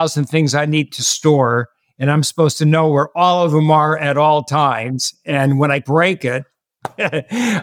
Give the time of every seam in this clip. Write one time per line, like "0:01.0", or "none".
0:05.8